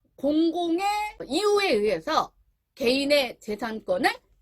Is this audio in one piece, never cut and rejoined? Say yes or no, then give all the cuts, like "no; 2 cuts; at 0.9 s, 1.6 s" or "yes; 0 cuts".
no; 1 cut; at 1.2 s